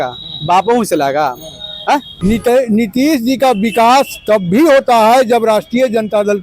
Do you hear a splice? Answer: yes; 1 cut; at 2.1 s

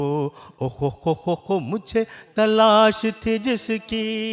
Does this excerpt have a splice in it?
no; 0 cuts

